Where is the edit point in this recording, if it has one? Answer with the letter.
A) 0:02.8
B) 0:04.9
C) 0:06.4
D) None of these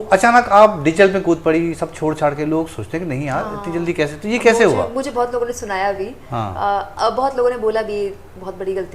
D